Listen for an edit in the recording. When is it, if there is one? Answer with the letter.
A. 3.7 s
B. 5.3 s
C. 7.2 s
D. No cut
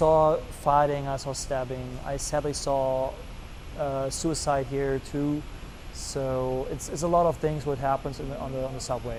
D